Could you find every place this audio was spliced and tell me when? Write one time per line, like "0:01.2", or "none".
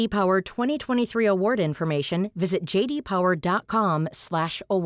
none